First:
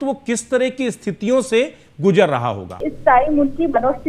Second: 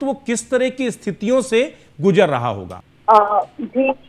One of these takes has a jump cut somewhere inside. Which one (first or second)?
first